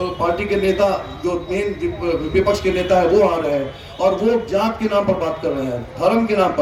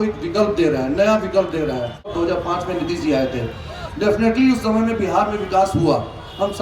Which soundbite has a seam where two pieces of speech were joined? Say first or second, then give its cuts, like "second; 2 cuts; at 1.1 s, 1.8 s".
second; 1 cut; at 2.1 s